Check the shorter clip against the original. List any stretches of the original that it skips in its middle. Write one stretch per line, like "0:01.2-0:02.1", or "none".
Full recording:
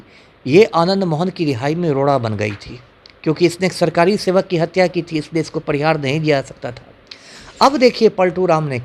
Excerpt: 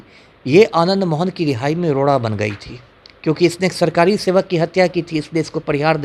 none